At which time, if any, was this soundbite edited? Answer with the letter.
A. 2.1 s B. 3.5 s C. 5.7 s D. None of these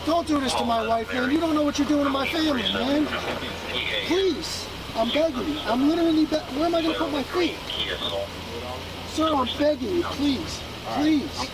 D